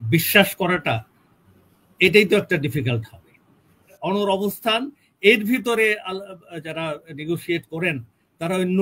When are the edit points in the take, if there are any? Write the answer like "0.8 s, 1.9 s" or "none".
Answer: 4.0 s